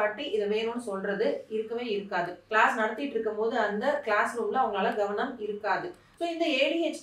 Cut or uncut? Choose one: cut